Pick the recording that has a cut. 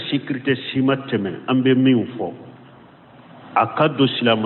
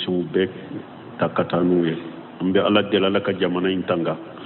first; 1 cut; at 2.1 s

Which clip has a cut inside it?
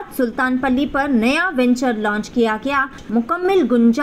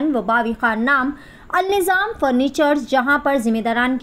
first; 1 cut; at 3.0 s

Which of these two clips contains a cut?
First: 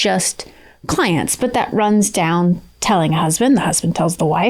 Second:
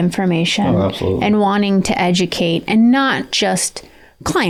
first; 1 cut; at 2.7 s

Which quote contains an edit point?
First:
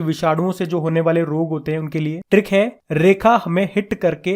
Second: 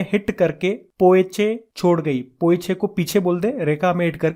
first; 1 cut; at 2.2 s

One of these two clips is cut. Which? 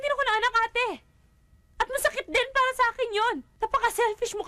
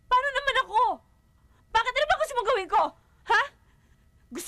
first; 1 cut; at 3.5 s

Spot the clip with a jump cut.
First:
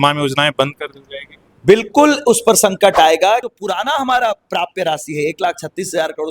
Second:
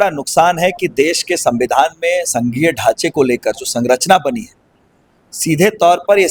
first; 1 cut; at 3.4 s

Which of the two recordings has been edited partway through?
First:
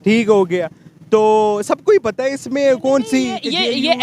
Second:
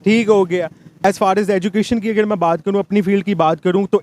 second; 1 cut; at 1.0 s

